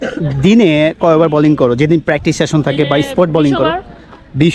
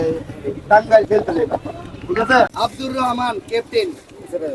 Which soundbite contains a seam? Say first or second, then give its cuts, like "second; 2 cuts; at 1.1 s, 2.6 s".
second; 1 cut; at 2.5 s